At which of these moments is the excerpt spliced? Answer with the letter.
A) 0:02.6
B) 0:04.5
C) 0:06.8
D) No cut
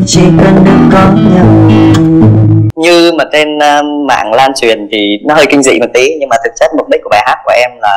A